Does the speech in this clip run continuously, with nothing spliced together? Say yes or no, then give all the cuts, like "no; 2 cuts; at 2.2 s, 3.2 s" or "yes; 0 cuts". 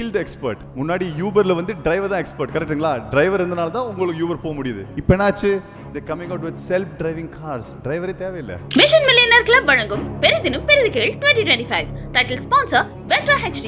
no; 1 cut; at 8.6 s